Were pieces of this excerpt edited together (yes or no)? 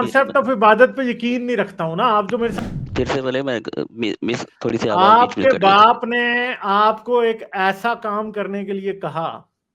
yes